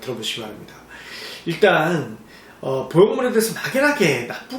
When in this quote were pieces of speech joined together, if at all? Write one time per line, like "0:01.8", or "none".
none